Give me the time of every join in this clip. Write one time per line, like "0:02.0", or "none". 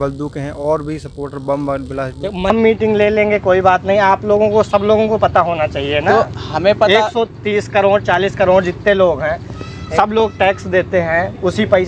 0:02.5

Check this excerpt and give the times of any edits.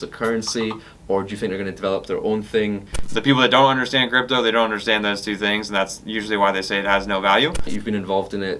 0:03.0
0:07.7

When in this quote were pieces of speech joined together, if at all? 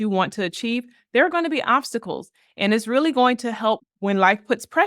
0:03.9

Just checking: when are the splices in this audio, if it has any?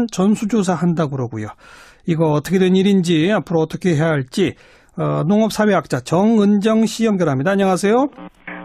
none

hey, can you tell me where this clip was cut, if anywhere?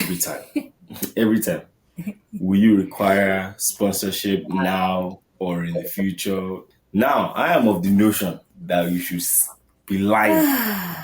0:06.7
0:08.5

